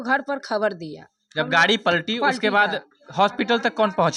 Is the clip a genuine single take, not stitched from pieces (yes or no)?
yes